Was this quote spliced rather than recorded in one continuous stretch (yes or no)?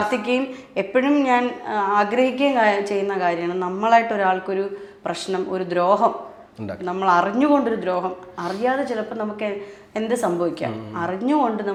no